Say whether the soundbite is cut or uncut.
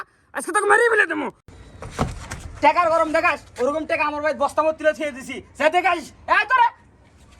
uncut